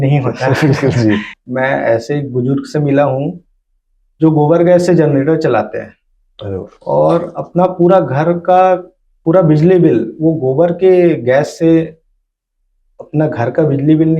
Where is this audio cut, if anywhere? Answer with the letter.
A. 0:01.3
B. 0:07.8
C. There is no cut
A